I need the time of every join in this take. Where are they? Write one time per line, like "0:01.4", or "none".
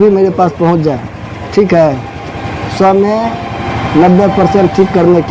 none